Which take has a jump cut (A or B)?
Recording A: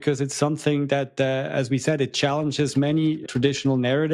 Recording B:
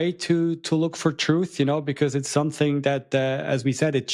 A